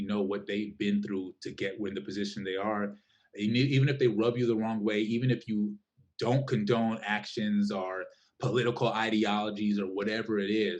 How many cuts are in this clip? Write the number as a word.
zero